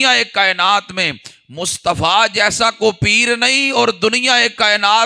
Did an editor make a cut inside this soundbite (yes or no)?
no